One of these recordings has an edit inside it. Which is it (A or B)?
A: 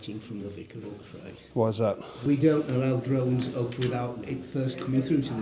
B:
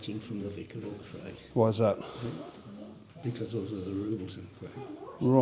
A